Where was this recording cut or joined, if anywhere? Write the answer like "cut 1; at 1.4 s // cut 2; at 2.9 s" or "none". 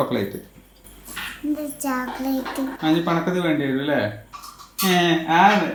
none